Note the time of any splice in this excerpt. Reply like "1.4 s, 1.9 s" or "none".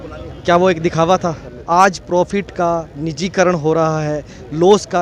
1.5 s